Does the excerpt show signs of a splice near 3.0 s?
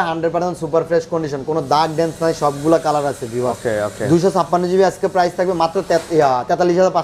no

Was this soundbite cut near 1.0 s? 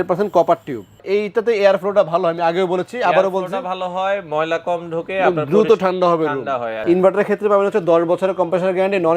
yes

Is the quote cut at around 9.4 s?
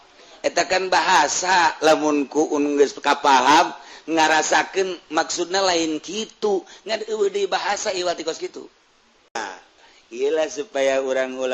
yes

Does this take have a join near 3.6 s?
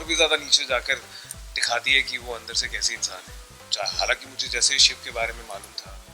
yes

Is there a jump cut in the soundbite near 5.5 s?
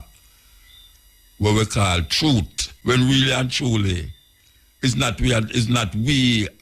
no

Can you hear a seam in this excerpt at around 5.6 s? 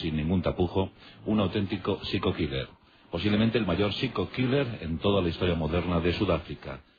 yes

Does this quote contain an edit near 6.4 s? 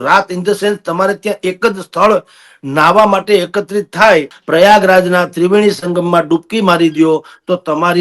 no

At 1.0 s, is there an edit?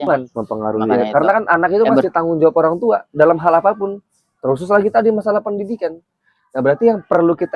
yes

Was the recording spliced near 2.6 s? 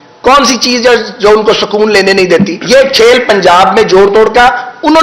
yes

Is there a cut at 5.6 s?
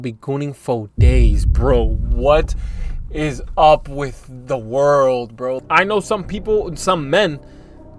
yes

